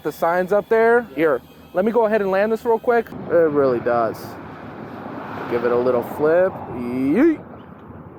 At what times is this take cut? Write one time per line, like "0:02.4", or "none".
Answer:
0:03.2